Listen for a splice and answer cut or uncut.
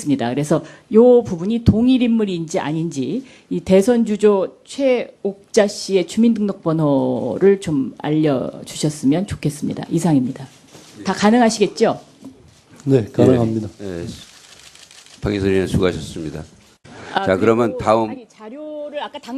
uncut